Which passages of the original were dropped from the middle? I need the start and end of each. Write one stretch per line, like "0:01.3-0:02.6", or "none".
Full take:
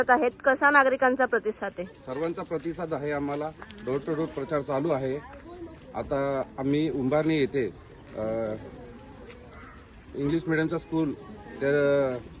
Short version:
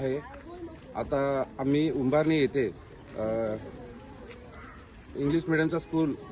none